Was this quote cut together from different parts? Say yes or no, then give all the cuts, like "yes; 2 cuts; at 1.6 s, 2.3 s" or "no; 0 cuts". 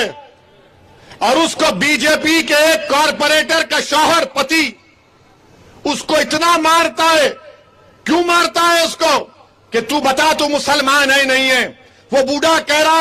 no; 0 cuts